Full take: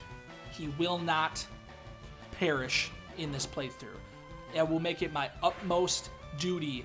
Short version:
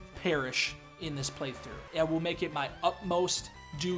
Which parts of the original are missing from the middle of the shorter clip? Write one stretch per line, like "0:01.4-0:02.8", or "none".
0:03.9-0:04.3